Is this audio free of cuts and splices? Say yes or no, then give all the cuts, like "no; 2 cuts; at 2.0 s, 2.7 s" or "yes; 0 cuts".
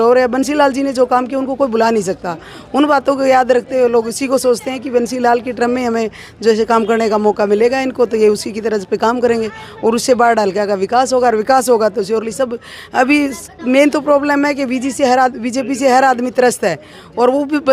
yes; 0 cuts